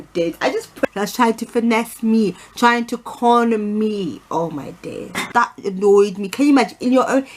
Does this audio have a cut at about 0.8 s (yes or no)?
yes